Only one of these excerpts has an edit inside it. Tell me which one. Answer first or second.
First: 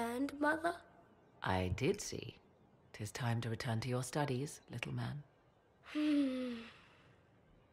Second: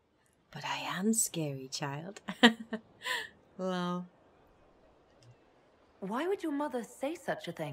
second